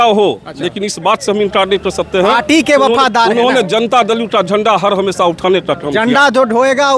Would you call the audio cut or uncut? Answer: uncut